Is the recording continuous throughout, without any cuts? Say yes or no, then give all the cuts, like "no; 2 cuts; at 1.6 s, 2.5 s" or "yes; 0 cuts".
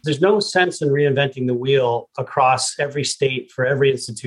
yes; 0 cuts